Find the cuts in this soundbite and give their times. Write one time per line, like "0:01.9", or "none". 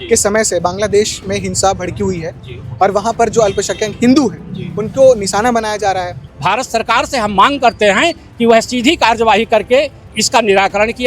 0:06.3